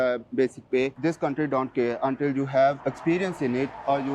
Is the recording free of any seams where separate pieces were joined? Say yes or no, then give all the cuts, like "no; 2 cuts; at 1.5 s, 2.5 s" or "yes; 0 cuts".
no; 1 cut; at 1.0 s